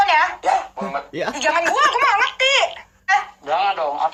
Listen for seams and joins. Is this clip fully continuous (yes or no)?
yes